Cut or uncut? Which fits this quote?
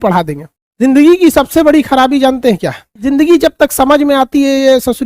cut